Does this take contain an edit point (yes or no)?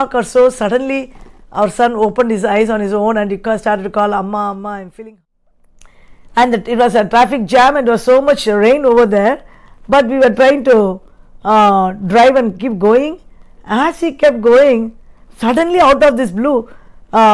yes